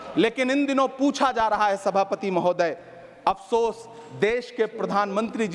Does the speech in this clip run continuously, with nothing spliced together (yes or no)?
yes